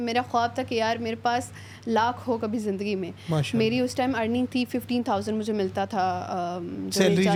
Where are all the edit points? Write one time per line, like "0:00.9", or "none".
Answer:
none